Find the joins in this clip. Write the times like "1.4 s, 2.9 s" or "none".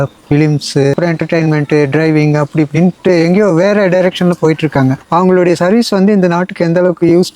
none